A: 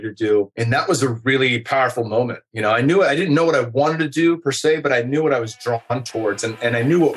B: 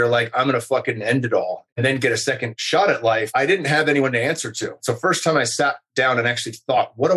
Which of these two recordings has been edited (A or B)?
B